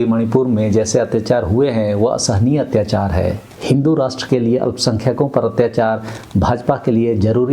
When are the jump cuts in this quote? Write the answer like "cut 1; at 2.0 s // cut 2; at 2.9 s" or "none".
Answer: cut 1; at 3.5 s